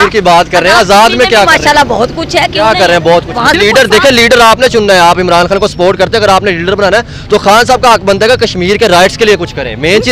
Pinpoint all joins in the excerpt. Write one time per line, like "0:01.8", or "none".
0:03.6